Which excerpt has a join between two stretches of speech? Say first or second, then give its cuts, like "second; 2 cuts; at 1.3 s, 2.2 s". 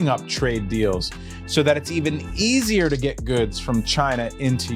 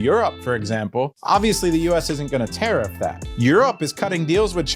second; 2 cuts; at 1.2 s, 3.2 s